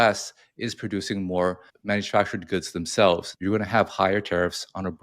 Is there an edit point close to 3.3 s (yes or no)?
yes